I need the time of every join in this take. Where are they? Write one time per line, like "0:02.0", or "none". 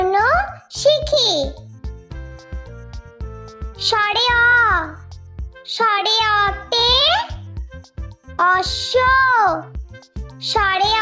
0:01.8
0:03.9